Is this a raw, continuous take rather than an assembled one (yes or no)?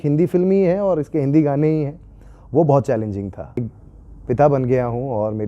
no